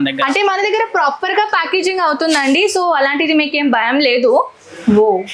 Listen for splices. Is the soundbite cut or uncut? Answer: uncut